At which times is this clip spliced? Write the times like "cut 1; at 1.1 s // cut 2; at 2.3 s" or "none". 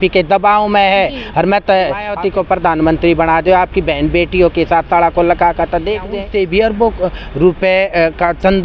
cut 1; at 2.1 s // cut 2; at 6.2 s